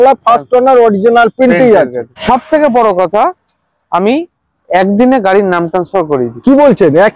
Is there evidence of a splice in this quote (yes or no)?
yes